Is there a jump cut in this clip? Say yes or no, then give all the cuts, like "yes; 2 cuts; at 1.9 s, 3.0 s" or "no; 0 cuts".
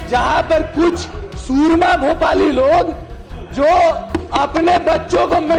no; 0 cuts